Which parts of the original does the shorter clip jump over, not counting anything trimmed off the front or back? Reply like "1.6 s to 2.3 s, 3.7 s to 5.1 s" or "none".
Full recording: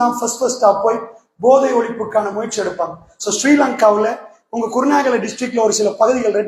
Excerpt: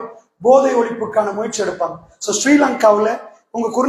none

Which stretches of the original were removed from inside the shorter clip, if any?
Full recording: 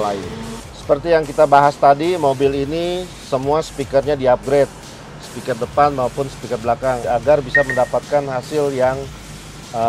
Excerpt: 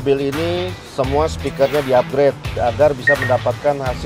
4.9 s to 7.0 s

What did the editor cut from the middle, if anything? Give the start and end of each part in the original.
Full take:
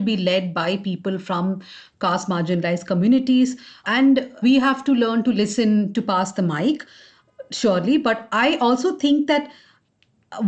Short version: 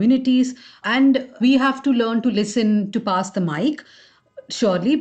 none

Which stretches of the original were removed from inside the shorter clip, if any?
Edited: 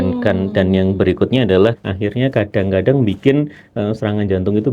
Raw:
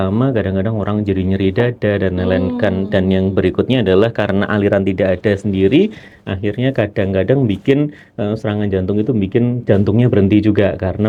4.2 s to 6.2 s

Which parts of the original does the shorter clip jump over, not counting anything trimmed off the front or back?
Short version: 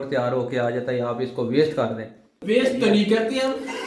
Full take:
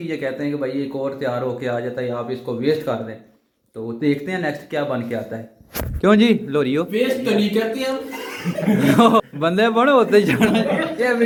3.5 s to 6.9 s

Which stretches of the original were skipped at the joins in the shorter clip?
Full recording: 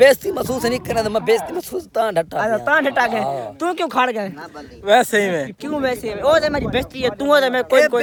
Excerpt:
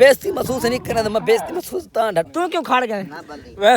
2.3 s to 3.5 s

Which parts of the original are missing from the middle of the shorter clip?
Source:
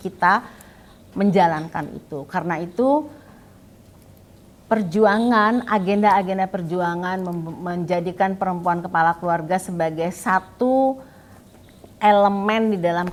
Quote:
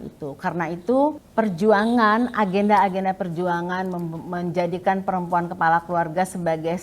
3.1 s to 4.6 s

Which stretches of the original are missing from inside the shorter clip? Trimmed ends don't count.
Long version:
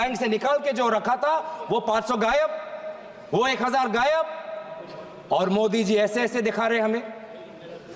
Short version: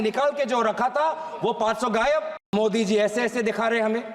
2.8 s to 5.5 s

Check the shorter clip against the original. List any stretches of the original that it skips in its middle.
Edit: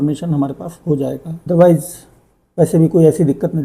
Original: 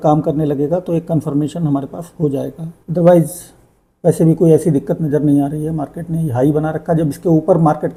2.6 s to 2.8 s

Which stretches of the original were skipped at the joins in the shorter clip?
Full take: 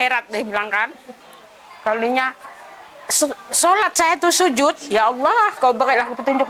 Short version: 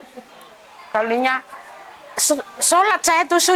none

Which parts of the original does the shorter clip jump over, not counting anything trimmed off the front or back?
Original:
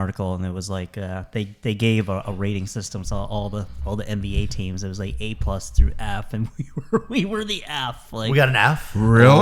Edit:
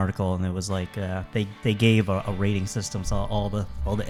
none

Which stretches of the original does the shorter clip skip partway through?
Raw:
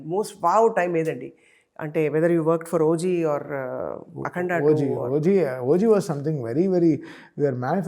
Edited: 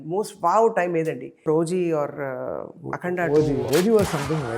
1.5 s to 2.8 s, 5.0 s to 5.6 s

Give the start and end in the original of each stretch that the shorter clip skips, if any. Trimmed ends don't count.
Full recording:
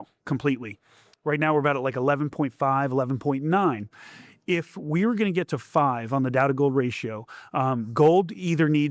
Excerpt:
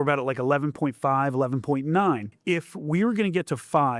3.9 s to 4.3 s

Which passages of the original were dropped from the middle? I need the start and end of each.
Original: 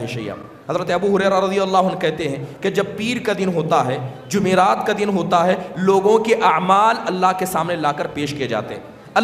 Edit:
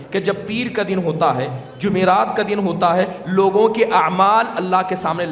none

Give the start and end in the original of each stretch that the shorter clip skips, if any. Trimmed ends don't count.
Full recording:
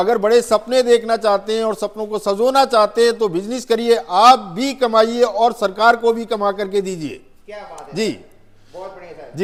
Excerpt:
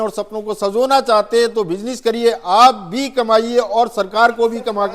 none

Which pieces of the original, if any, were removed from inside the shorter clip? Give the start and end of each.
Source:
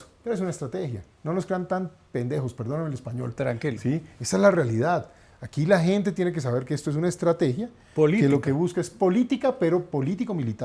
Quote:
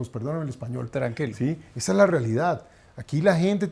none

